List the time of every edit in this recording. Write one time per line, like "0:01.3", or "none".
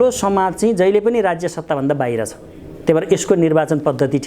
none